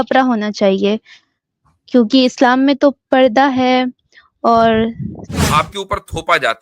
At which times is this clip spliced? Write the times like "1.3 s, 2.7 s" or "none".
5.3 s